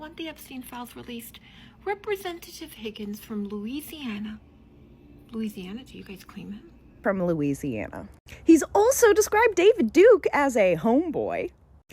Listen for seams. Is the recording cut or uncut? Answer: cut